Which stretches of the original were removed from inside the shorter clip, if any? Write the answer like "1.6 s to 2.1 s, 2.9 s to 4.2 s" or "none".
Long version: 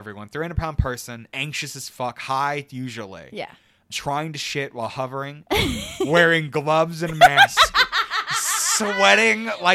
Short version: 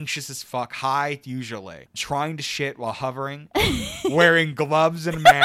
3.2 s to 3.7 s